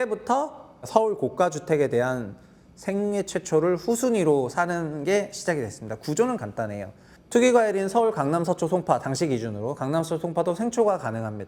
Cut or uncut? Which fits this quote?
uncut